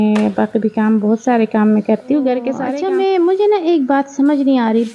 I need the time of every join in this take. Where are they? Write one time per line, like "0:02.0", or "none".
0:02.7